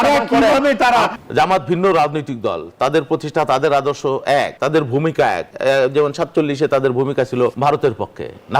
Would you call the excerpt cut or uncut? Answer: cut